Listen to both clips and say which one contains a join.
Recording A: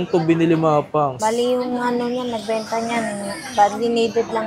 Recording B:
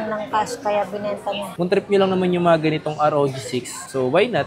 B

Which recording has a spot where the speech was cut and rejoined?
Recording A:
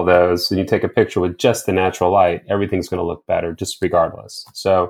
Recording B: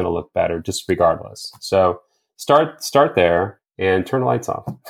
B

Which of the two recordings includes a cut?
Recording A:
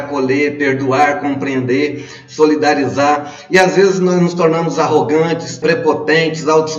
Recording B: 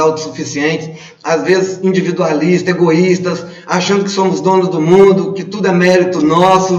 A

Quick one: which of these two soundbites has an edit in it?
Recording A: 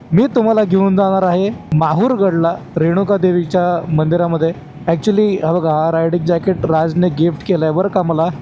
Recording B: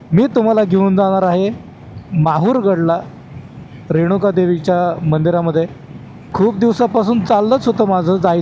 A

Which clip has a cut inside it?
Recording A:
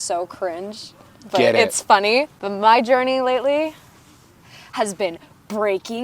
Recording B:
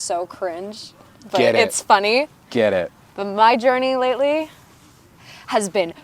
A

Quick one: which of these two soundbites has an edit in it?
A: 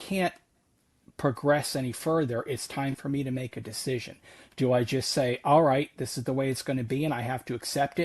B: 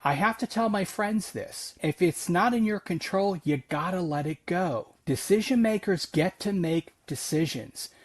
B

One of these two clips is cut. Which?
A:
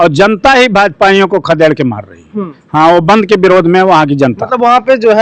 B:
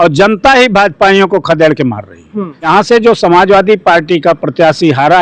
B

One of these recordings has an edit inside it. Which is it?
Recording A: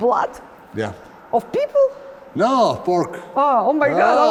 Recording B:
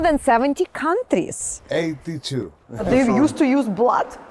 B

